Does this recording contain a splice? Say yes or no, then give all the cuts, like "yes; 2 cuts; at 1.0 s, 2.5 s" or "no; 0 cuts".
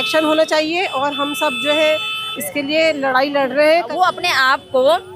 yes; 1 cut; at 3.9 s